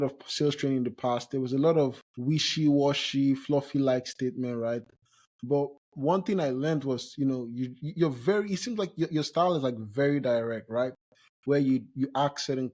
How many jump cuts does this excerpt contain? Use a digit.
0